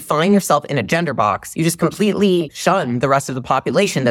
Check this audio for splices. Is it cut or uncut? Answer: uncut